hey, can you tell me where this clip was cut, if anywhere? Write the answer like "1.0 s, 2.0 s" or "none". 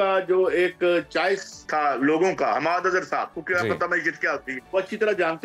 1.6 s, 3.4 s, 4.5 s